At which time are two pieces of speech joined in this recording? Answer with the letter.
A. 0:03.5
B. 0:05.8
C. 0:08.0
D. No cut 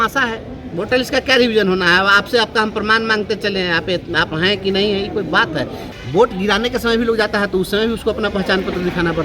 B